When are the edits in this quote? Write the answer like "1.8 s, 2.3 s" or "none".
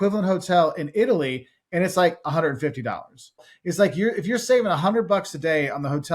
3.5 s